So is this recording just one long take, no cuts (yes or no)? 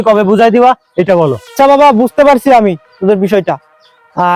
yes